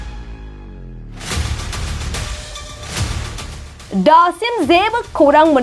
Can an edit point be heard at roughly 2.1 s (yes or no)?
yes